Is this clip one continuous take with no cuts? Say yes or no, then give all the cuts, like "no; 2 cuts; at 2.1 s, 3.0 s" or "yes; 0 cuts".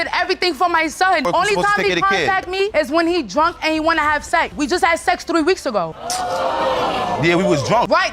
no; 2 cuts; at 1.2 s, 4.5 s